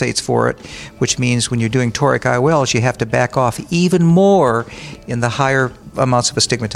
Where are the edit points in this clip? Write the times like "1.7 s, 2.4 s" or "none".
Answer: 5.8 s